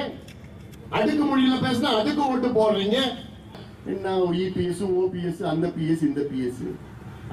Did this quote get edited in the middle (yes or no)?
yes